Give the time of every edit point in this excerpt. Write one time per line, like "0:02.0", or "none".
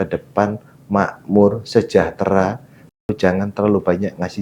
0:03.0

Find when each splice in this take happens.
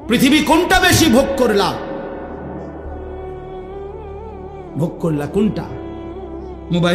none

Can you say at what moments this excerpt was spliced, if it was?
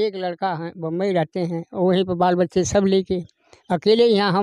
none

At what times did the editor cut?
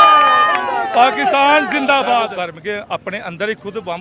0:02.3

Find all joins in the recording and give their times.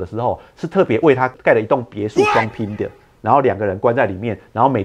0:01.3

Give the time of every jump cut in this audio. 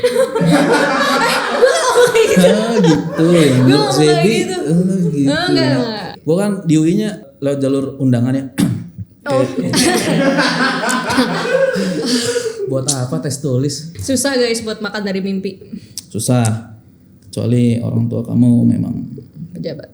0:06.0
0:07.2
0:11.8
0:13.9

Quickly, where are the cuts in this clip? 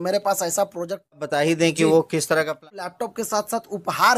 0:01.1
0:02.9

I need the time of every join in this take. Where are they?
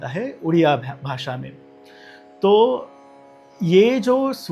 none

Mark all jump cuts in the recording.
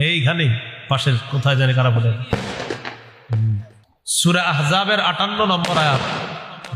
0:03.9

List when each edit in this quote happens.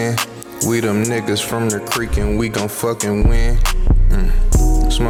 none

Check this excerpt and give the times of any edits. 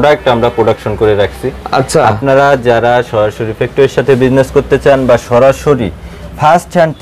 none

